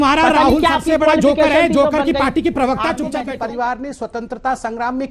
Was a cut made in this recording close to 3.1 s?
yes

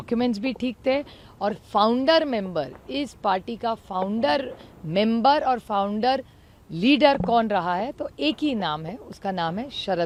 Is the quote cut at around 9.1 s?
no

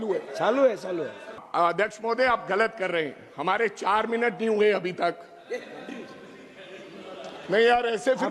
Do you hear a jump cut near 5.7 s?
no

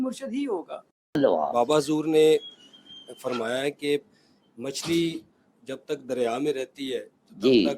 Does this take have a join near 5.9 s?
no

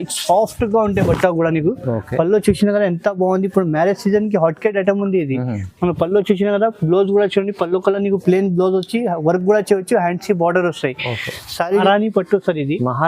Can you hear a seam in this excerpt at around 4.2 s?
no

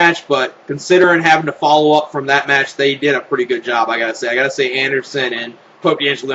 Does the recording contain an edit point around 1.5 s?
yes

